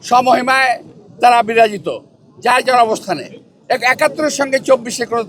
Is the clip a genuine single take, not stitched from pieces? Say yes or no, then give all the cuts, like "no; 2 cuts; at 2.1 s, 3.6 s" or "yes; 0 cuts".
yes; 0 cuts